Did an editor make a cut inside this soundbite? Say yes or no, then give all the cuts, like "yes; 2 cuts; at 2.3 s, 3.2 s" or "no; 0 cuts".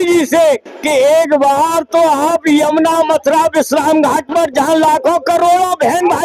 no; 0 cuts